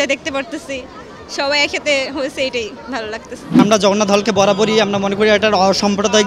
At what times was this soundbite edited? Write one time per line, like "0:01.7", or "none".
0:03.6